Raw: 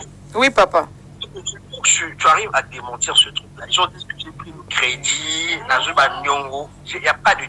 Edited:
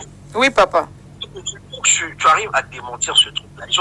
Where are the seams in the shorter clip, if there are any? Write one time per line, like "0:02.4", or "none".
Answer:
none